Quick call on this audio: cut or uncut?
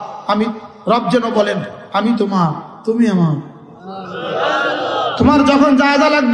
uncut